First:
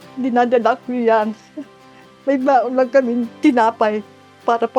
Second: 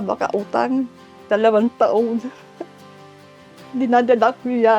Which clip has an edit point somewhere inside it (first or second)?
second